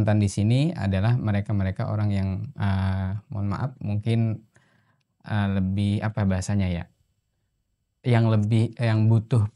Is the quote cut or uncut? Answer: uncut